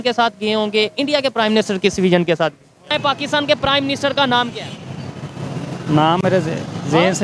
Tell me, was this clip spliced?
yes; 1 cut; at 2.9 s

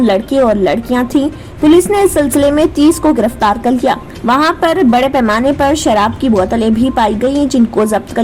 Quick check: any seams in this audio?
no; 0 cuts

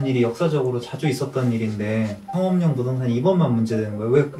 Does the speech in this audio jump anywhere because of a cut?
yes; 1 cut; at 2.3 s

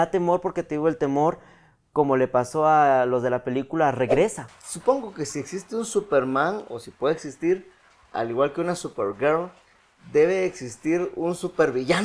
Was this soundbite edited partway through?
yes; 1 cut; at 4.5 s

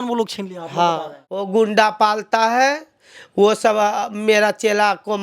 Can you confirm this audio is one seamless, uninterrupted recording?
no; 1 cut; at 1.4 s

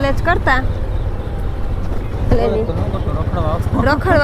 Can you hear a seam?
no; 0 cuts

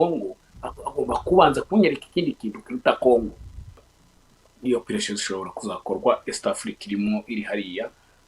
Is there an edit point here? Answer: yes; 1 cut; at 3.8 s

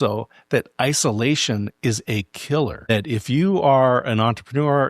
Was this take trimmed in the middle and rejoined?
yes; 1 cut; at 2.9 s

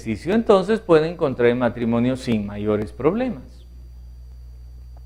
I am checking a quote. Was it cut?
no; 0 cuts

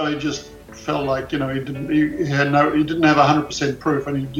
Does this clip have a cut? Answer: no; 0 cuts

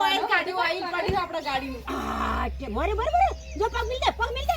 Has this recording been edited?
yes; 1 cut; at 1.8 s

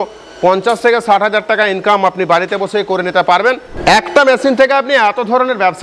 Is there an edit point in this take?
yes; 1 cut; at 3.7 s

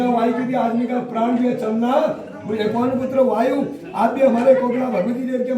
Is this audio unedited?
yes; 0 cuts

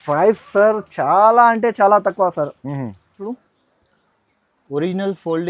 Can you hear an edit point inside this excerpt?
yes; 1 cut; at 3.4 s

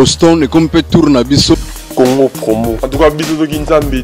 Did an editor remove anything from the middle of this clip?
yes; 1 cut; at 1.8 s

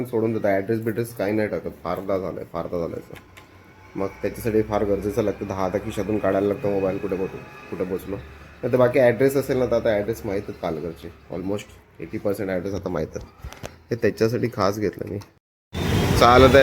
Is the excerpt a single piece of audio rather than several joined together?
no; 1 cut; at 15.4 s

